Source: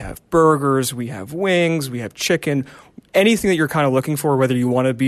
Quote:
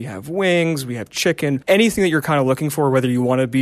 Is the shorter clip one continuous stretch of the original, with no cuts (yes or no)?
no